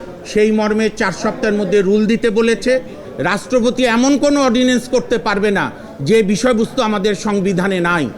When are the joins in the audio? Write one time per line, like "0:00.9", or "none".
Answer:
0:03.0